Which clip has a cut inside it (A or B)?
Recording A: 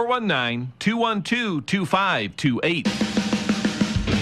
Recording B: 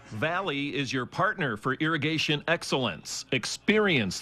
A